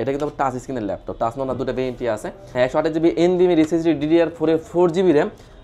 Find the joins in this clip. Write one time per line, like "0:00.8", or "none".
0:02.5